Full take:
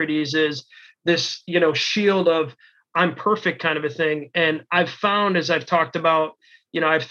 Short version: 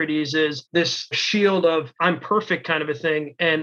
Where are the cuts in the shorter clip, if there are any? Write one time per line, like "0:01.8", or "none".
0:01.1
0:01.9